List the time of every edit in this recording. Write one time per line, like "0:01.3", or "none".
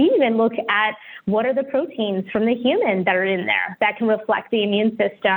none